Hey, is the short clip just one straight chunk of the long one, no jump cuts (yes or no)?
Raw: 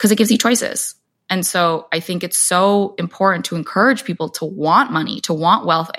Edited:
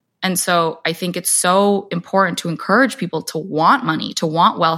yes